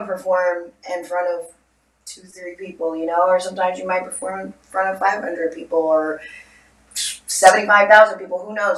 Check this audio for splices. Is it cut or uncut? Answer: uncut